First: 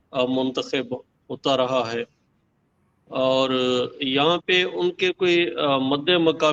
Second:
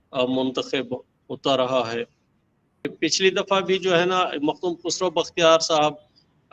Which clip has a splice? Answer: second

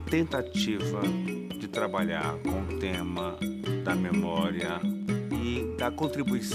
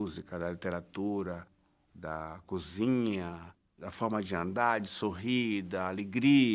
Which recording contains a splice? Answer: second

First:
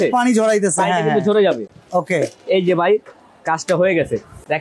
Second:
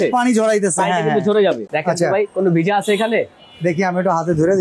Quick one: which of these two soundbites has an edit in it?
second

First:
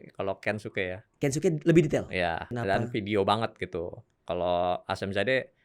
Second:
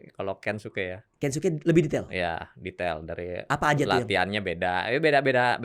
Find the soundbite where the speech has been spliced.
first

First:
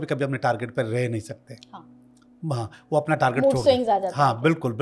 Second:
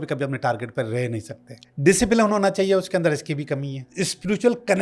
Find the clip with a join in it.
second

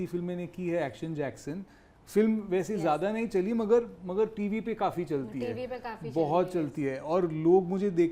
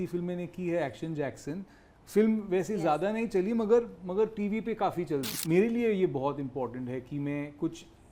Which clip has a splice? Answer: second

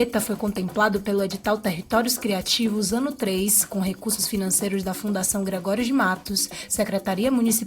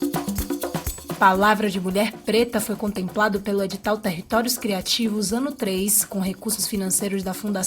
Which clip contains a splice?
second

